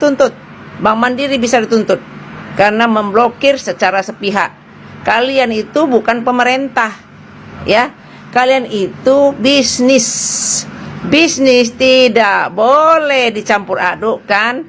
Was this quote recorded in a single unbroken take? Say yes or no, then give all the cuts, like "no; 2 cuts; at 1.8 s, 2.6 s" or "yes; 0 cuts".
yes; 0 cuts